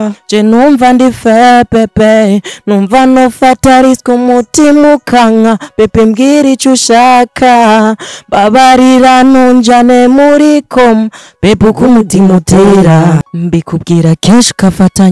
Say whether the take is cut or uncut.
cut